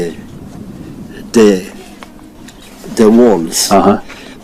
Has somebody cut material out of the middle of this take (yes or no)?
yes